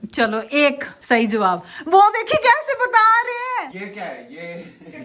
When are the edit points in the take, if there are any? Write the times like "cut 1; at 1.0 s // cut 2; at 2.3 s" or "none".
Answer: cut 1; at 0.9 s // cut 2; at 3.7 s